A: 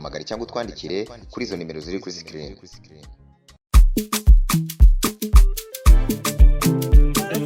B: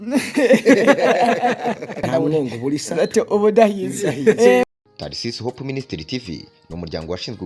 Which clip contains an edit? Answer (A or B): B